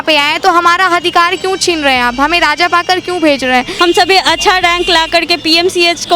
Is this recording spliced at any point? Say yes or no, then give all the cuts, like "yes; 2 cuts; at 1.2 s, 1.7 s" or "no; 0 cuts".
yes; 1 cut; at 3.7 s